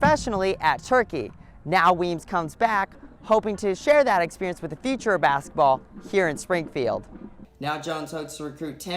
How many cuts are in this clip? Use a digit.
1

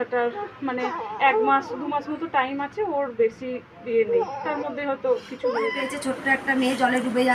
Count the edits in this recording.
1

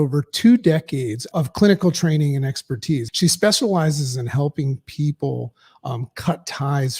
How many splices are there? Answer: 2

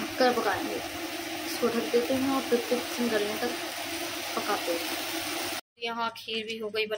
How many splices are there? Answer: 1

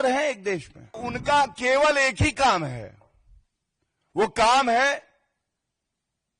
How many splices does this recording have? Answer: 1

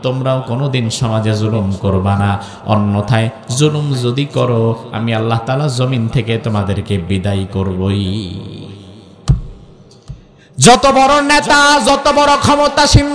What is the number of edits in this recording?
0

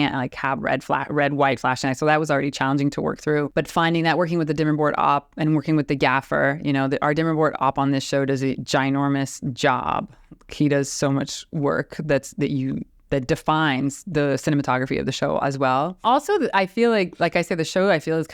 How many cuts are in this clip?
2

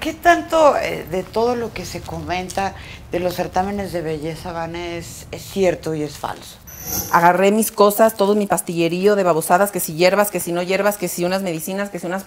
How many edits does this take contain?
1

